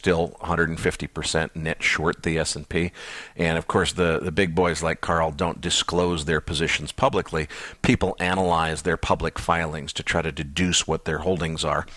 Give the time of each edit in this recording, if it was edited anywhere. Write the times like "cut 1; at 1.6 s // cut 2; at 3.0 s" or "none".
cut 1; at 1.1 s

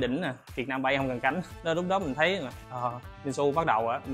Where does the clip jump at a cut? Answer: cut 1; at 1.5 s

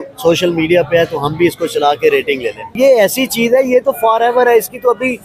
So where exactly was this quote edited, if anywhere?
cut 1; at 2.7 s

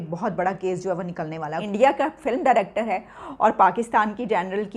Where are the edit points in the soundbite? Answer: cut 1; at 1.6 s

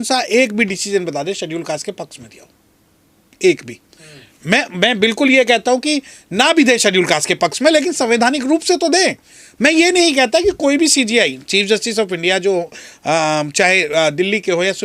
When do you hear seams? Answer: none

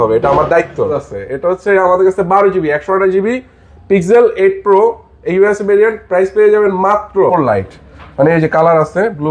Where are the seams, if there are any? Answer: cut 1; at 1.1 s // cut 2; at 7.3 s

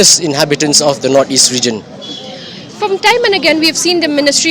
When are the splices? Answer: none

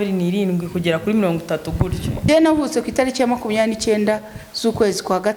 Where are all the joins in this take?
cut 1; at 2.3 s

